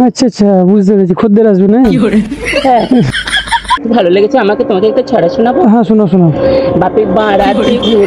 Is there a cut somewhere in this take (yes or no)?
yes